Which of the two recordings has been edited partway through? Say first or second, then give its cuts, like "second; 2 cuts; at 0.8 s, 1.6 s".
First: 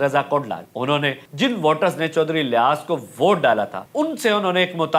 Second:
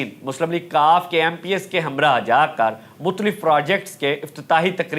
first; 2 cuts; at 0.8 s, 3.8 s